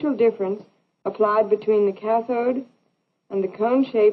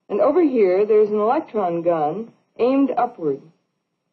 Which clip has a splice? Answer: second; 1 cut; at 2.4 s

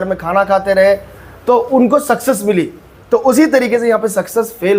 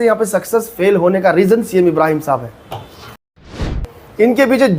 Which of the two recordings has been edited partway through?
second; 1 cut; at 3.7 s

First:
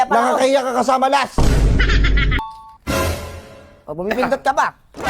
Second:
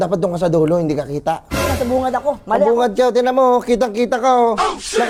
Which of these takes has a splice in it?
first; 2 cuts; at 2.6 s, 3.6 s

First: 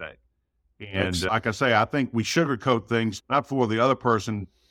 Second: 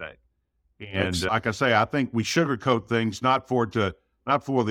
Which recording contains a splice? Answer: first; 1 cut; at 3.2 s

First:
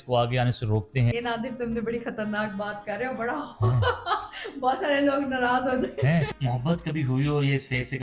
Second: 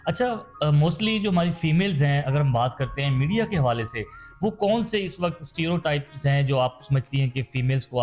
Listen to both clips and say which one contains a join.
first; 2 cuts; at 1.1 s, 6.3 s

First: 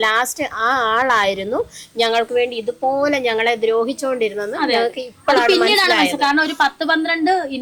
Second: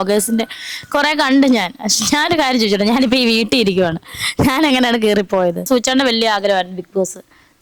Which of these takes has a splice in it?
second; 1 cut; at 5.7 s

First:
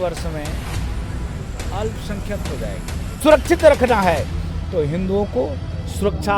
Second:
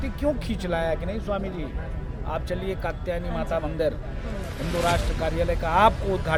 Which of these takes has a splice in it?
first; 1 cut; at 3.0 s

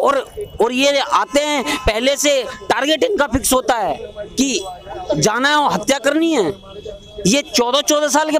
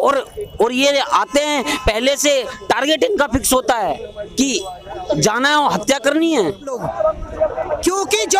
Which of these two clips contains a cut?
second; 1 cut; at 6.8 s

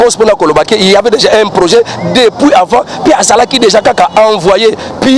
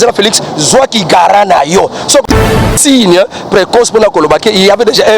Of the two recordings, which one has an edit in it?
second; 1 cut; at 2.4 s

